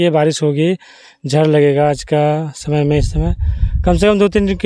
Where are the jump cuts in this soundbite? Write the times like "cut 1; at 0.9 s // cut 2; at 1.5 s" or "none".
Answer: none